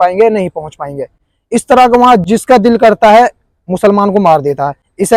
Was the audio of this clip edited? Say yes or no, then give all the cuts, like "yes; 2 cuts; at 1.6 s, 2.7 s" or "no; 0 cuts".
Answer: no; 0 cuts